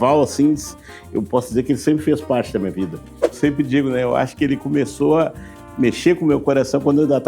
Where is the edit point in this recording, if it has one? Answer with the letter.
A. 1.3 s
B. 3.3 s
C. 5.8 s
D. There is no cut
B